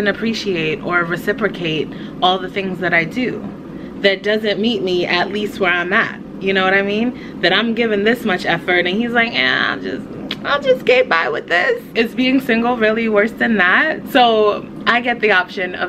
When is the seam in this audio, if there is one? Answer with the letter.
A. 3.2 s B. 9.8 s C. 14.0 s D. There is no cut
C